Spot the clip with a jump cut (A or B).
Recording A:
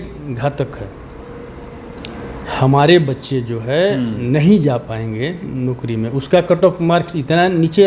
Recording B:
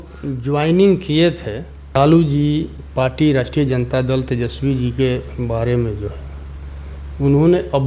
B